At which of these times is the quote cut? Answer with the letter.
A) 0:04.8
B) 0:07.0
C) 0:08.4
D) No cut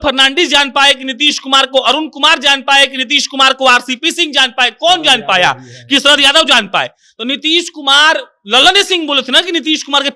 D